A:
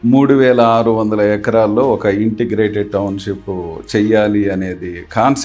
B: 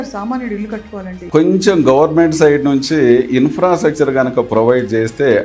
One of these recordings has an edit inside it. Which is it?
B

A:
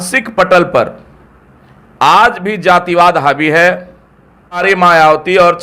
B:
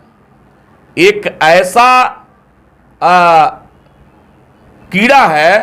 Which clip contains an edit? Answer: A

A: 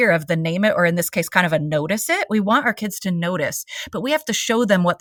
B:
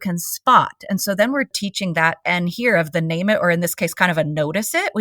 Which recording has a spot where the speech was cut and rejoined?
B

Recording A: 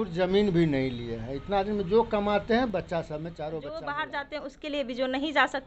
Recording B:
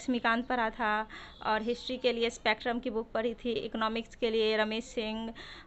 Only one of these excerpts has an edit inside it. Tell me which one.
A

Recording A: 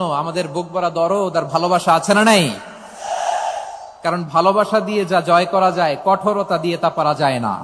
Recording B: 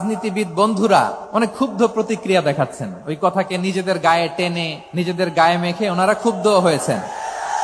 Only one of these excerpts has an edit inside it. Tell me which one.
B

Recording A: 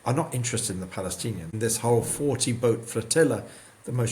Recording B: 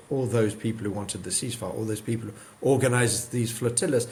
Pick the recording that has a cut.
A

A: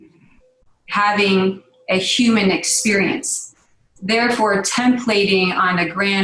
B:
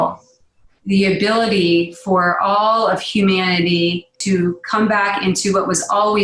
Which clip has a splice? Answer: B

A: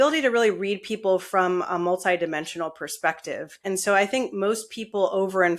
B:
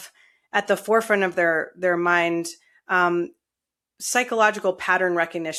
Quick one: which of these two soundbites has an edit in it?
A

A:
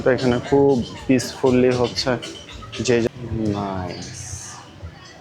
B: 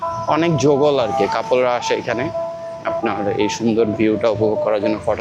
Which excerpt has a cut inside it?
A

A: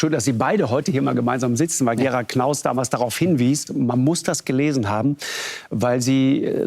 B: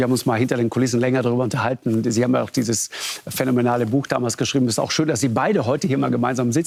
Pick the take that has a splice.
A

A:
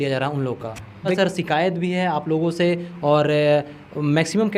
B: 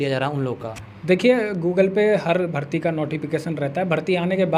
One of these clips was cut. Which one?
A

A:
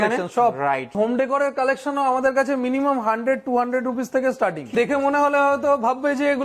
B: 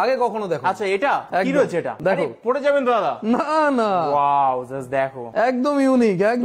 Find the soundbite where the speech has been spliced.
A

